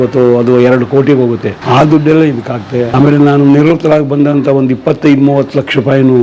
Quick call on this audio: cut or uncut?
cut